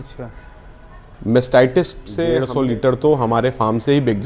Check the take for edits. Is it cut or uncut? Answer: cut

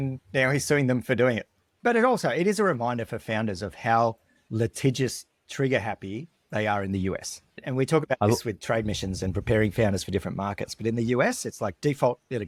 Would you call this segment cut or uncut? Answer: uncut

